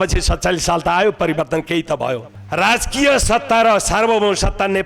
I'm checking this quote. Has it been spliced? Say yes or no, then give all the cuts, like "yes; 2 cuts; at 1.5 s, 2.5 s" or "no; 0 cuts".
yes; 1 cut; at 2.3 s